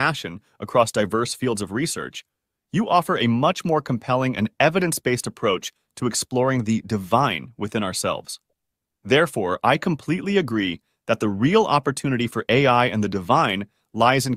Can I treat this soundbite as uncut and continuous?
yes; 0 cuts

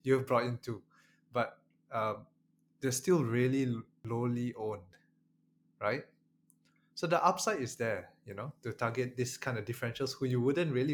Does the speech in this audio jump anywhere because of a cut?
yes; 1 cut; at 3.9 s

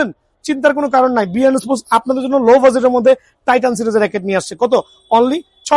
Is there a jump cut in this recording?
no; 0 cuts

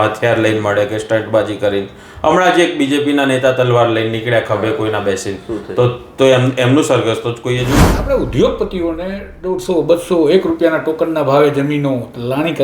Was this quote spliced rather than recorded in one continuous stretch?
yes; 1 cut; at 7.8 s

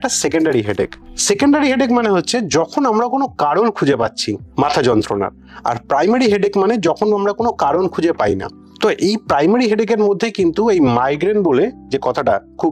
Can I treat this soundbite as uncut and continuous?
yes; 0 cuts

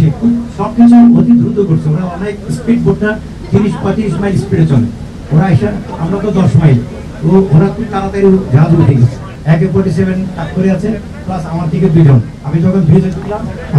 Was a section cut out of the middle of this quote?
yes; 1 cut; at 9.3 s

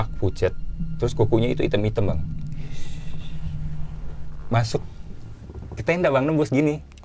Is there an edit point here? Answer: no; 0 cuts

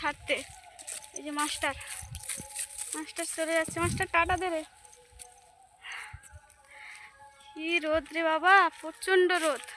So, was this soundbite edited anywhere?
no; 0 cuts

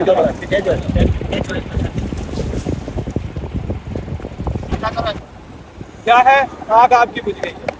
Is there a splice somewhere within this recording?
yes; 1 cut; at 5.2 s

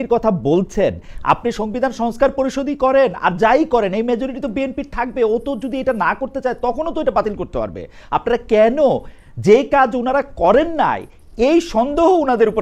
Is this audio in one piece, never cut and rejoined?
yes; 0 cuts

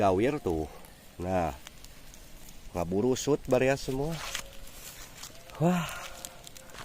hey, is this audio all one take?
yes; 0 cuts

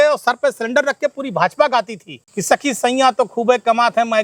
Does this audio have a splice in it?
no; 0 cuts

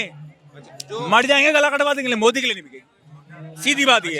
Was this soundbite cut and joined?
no; 0 cuts

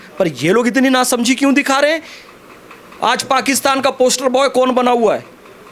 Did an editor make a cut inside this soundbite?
no; 0 cuts

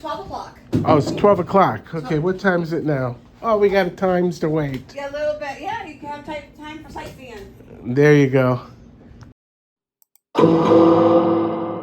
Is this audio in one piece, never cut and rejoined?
no; 1 cut; at 9.4 s

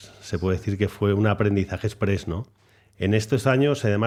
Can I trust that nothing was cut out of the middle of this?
yes; 0 cuts

